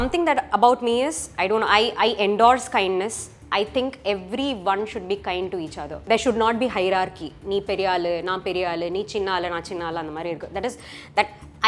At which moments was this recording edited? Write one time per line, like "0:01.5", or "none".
0:05.9